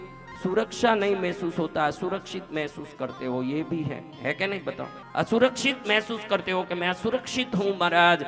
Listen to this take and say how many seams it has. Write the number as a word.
one